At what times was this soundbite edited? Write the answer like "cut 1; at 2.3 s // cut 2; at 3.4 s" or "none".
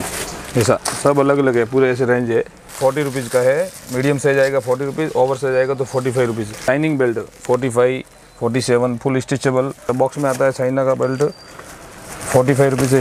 cut 1; at 2.6 s // cut 2; at 6.5 s // cut 3; at 9.8 s